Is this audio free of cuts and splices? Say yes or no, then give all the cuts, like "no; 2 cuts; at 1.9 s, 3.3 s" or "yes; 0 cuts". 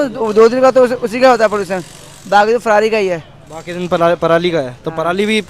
yes; 0 cuts